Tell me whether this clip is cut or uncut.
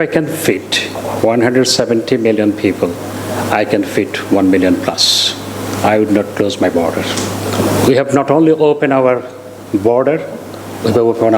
cut